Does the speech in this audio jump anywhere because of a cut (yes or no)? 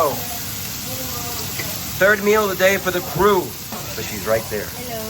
yes